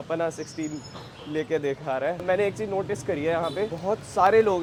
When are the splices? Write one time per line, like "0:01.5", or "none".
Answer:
none